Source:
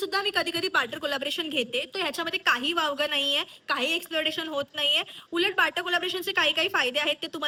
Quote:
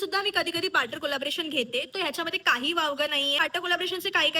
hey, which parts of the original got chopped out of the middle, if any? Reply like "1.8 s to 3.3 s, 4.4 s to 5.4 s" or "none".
3.4 s to 5.6 s